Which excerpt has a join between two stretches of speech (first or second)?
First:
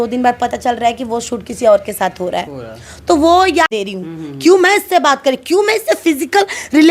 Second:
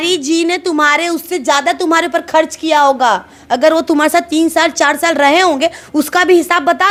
first